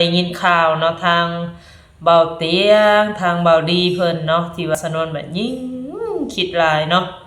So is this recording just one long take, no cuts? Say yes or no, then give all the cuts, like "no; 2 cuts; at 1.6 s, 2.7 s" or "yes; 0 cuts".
no; 1 cut; at 4.7 s